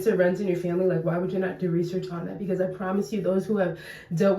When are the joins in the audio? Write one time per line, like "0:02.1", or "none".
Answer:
none